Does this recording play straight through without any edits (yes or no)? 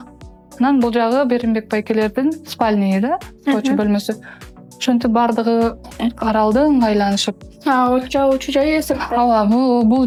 yes